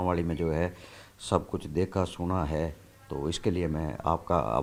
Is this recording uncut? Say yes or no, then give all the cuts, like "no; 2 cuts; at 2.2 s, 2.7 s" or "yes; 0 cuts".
yes; 0 cuts